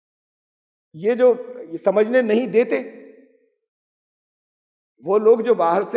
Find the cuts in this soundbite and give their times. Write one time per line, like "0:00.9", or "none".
none